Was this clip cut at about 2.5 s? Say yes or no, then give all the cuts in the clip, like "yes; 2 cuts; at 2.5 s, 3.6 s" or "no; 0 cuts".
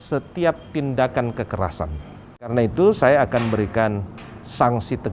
yes; 1 cut; at 2.5 s